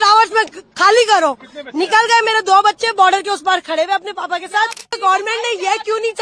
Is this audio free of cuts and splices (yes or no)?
no